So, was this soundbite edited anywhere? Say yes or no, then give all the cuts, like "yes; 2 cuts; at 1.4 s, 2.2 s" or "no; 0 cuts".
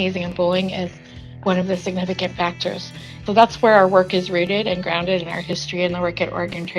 yes; 2 cuts; at 1.2 s, 3.2 s